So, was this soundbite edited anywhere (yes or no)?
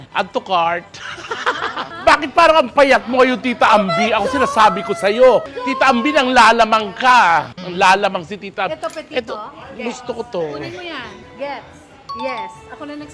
no